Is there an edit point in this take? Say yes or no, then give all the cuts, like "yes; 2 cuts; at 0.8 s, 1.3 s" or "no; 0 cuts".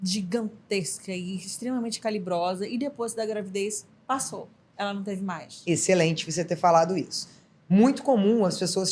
no; 0 cuts